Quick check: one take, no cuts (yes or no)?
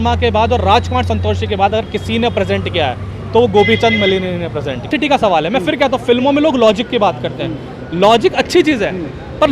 yes